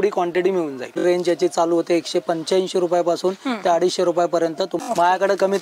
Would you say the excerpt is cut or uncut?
cut